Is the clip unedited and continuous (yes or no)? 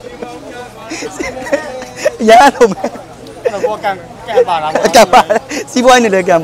yes